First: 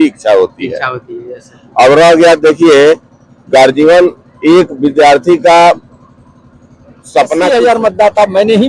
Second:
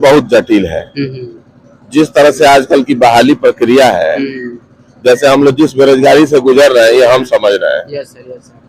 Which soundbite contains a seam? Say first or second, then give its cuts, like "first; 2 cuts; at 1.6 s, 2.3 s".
first; 1 cut; at 7.5 s